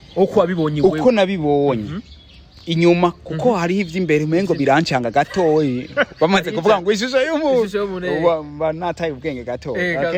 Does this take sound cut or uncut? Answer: uncut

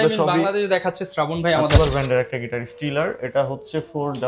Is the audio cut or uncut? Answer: cut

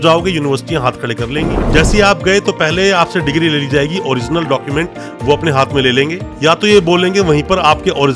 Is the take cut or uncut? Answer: cut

